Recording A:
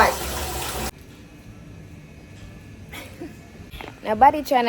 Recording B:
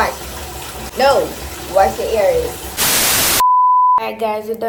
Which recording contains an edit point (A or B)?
A